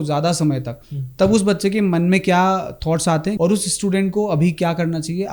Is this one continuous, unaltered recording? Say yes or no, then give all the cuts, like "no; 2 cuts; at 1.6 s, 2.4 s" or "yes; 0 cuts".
no; 1 cut; at 3.4 s